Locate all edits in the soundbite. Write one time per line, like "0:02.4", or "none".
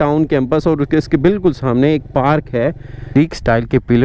0:03.2